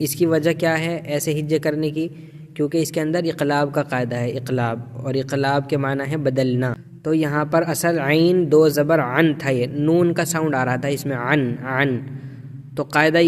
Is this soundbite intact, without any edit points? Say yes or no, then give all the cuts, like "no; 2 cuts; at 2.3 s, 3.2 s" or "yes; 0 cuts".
no; 1 cut; at 6.9 s